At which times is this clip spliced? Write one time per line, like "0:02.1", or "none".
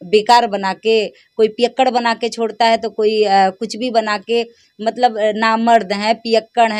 none